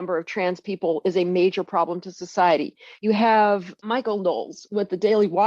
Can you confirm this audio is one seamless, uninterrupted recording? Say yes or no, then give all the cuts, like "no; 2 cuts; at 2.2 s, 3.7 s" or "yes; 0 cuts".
yes; 0 cuts